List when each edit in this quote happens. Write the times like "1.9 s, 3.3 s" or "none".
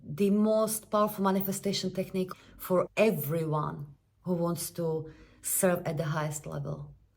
2.3 s